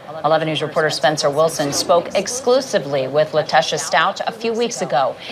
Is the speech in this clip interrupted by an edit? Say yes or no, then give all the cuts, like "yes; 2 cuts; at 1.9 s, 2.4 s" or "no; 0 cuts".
yes; 1 cut; at 2.7 s